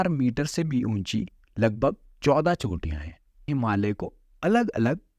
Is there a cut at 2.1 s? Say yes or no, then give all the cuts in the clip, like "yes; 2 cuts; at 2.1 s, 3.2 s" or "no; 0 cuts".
no; 1 cut; at 3.5 s